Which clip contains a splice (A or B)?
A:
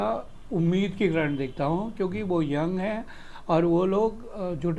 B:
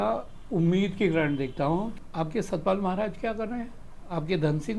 B